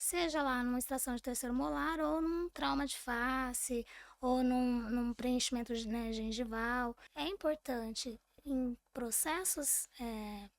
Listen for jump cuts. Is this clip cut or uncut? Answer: cut